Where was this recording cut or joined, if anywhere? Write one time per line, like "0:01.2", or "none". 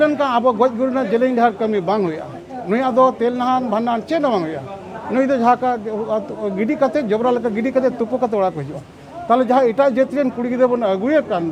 none